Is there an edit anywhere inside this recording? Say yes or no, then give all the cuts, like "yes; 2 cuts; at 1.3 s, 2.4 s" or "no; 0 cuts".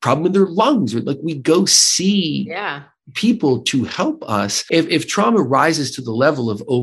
yes; 1 cut; at 4.6 s